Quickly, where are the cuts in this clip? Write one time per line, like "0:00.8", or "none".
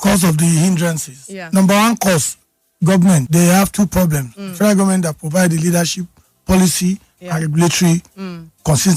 0:03.3